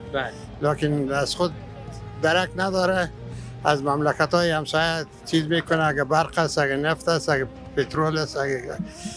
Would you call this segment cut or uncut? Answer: uncut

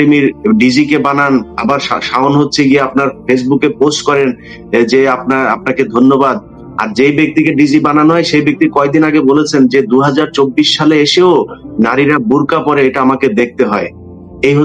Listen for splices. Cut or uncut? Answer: uncut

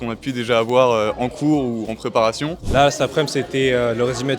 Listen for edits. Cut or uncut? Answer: uncut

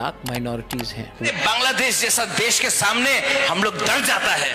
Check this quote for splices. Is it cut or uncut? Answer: cut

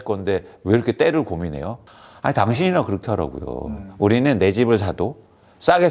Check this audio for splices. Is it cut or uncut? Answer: cut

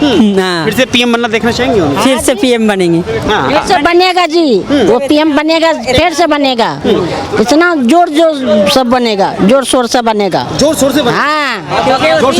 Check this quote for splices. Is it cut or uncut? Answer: uncut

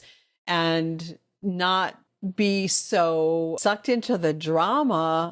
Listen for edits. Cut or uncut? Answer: cut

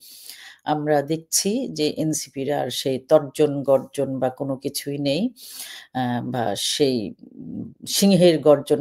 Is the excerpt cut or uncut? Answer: uncut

